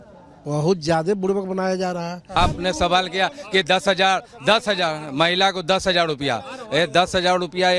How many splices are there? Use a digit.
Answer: 1